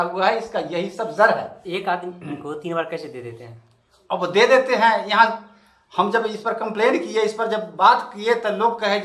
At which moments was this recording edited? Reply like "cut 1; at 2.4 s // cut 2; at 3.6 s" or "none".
none